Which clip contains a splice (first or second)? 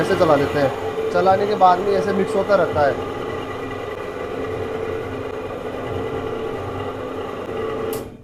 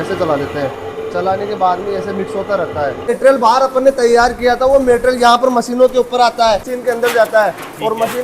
second